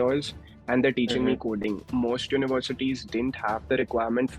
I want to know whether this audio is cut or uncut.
cut